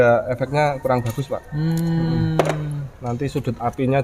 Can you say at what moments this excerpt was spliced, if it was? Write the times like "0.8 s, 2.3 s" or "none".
none